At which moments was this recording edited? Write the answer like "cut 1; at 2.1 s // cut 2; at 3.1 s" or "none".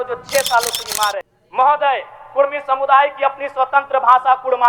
cut 1; at 1.3 s